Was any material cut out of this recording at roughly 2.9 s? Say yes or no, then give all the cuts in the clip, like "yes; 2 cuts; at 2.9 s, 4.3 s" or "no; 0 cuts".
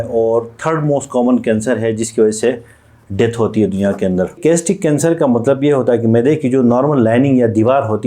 no; 1 cut; at 4.4 s